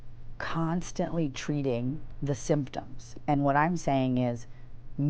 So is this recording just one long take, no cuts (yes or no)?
no